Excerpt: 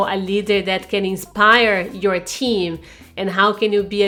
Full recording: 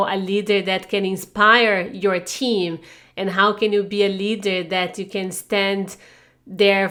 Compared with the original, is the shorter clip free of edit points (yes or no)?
yes